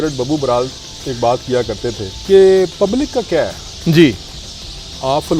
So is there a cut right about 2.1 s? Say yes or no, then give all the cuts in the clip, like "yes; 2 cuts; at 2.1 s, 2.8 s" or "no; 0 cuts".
yes; 1 cut; at 2.1 s